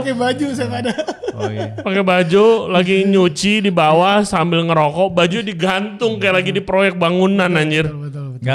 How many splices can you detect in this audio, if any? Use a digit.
0